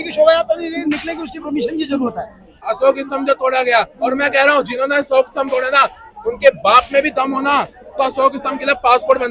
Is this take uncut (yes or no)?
no